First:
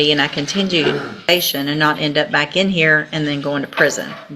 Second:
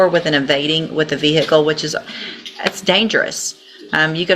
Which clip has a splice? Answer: first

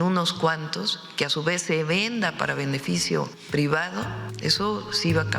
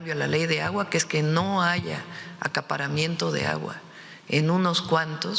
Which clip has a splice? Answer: first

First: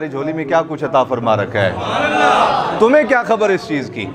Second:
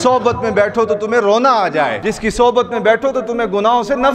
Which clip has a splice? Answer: second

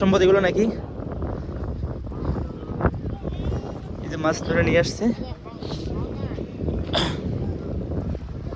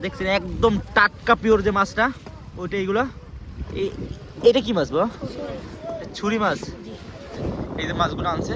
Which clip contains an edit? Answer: second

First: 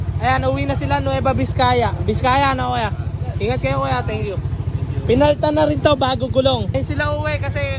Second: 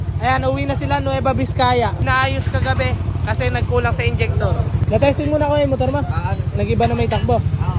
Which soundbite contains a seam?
second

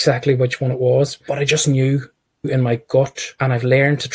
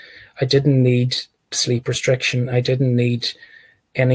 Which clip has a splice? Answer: first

